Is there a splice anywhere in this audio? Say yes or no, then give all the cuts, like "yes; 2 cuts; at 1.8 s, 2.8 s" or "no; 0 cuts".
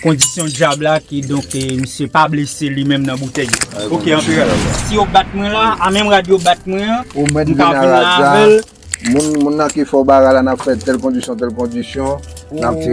yes; 1 cut; at 4.7 s